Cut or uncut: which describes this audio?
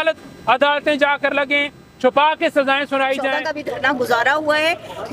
cut